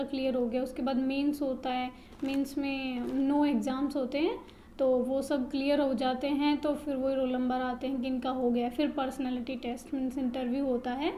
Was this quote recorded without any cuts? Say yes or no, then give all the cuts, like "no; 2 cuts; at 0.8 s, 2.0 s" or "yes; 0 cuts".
yes; 0 cuts